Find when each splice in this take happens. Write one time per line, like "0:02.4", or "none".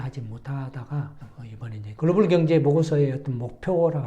0:01.9